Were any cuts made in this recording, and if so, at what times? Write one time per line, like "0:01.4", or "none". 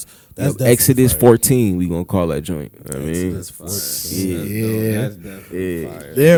none